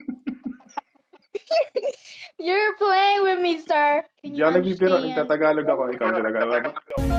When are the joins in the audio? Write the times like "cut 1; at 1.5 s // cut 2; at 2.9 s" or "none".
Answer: none